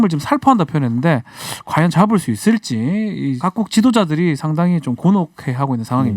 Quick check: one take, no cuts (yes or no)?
no